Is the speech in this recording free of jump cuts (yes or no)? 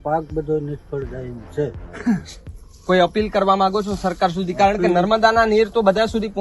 yes